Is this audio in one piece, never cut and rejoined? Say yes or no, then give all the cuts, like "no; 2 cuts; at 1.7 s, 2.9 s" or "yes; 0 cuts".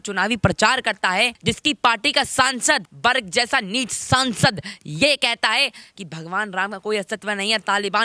no; 2 cuts; at 1.3 s, 2.9 s